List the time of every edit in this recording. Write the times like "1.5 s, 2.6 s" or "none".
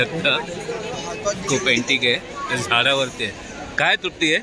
none